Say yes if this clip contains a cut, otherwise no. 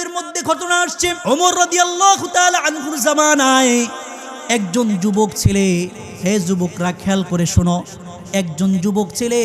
yes